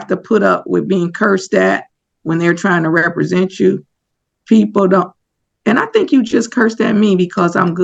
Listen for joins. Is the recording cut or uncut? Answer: uncut